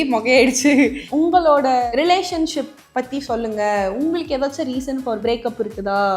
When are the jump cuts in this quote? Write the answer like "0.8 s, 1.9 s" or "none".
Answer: 1.0 s, 1.8 s, 5.2 s